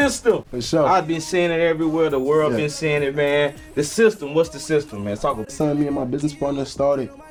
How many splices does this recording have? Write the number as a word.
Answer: zero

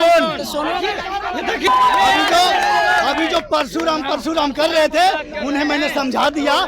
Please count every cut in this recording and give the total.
one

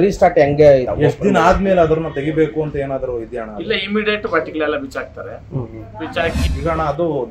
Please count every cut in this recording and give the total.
one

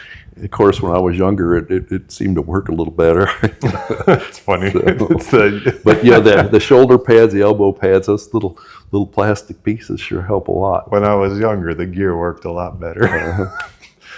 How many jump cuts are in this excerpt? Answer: zero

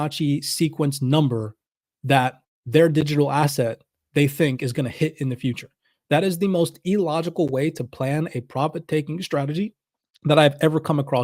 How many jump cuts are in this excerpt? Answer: one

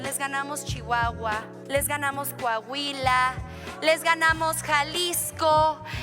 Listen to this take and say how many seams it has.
one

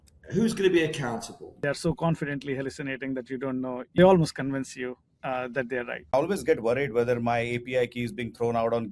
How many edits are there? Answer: three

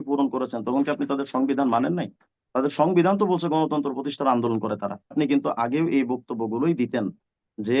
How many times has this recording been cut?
one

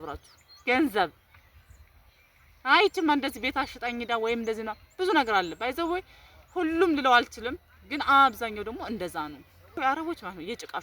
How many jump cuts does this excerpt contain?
one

